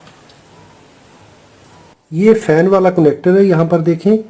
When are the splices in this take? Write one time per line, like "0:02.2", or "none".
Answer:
0:01.9